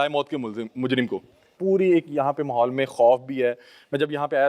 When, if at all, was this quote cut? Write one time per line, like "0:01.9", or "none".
0:01.5